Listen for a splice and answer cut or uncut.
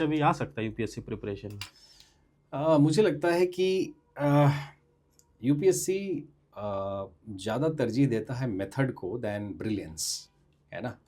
uncut